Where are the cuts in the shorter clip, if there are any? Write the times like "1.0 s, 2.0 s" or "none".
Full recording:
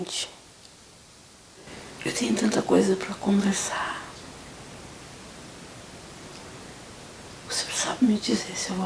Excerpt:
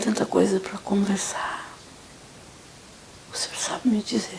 3.0 s